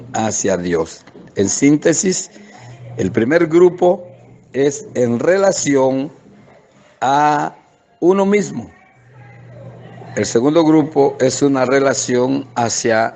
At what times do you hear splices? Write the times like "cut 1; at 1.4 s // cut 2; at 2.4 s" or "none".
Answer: none